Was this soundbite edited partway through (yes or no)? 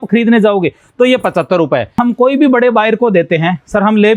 yes